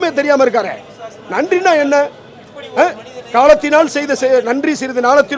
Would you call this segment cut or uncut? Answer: uncut